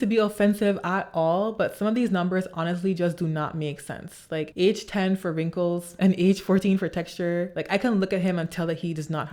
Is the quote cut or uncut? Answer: uncut